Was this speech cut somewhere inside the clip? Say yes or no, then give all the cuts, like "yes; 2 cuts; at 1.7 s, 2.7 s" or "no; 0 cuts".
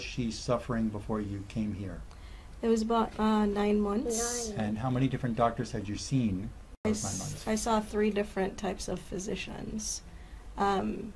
yes; 1 cut; at 6.8 s